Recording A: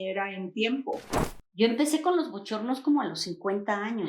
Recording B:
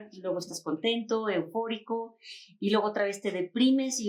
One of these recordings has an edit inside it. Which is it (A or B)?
A